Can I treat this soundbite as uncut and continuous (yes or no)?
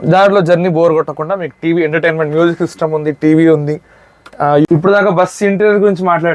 no